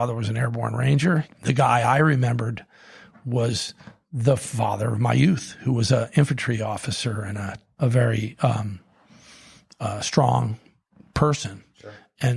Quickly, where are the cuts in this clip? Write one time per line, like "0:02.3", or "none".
0:01.3
0:07.6